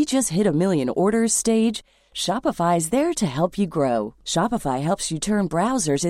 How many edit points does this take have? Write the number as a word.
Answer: zero